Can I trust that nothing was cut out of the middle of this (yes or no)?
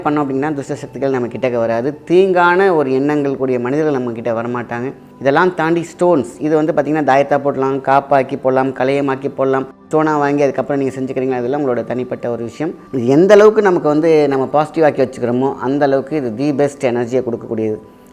no